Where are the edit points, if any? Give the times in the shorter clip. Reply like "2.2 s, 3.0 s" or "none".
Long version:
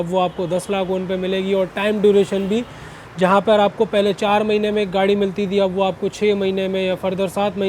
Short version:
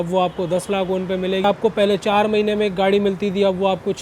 1.4 s